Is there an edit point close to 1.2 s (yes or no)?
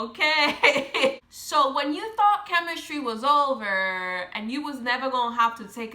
yes